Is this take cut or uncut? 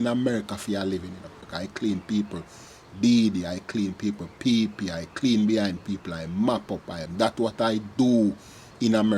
cut